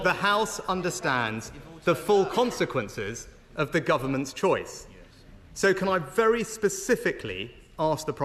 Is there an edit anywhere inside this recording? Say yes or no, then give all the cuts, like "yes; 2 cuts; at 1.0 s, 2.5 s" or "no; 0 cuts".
no; 0 cuts